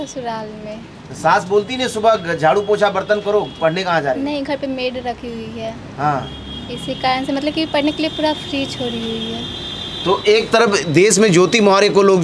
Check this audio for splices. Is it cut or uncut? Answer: uncut